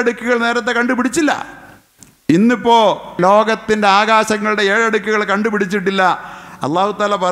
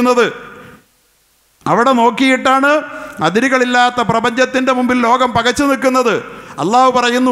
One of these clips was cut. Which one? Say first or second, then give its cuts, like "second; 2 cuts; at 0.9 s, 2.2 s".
first; 1 cut; at 3.1 s